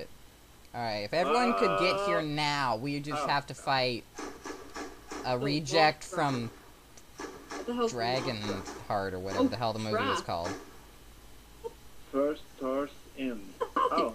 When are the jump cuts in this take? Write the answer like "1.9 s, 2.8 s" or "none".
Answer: 2.8 s